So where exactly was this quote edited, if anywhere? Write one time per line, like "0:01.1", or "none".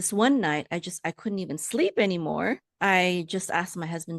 0:02.7

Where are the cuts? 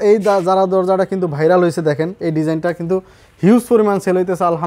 none

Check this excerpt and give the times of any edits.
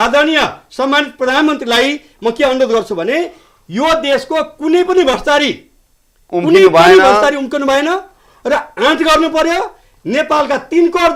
none

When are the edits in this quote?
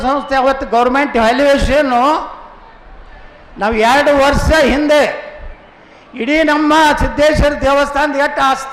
none

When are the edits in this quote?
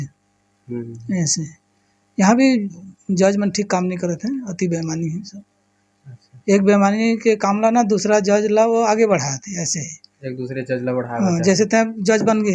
none

